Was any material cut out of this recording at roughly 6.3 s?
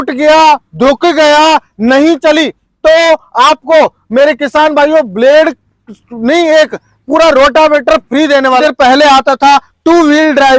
no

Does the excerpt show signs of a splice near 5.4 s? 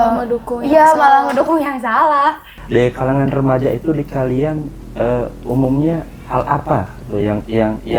no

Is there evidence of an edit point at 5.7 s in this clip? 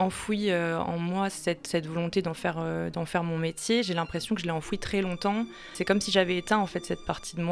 yes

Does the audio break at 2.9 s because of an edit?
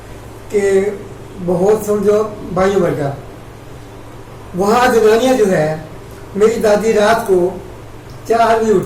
no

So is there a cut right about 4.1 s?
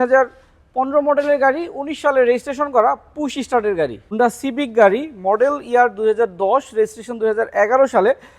yes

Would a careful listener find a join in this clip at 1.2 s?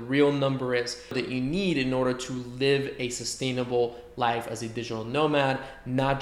yes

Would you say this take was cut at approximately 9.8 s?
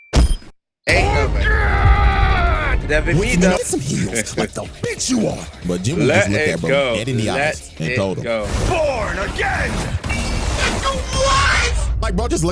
no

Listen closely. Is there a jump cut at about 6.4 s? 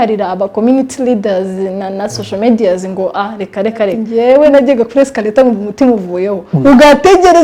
no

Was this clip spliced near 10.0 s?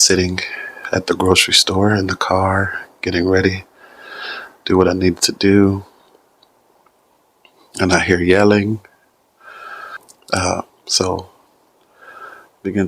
yes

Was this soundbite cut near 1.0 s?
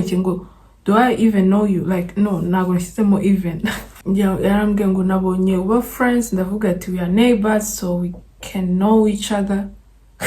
no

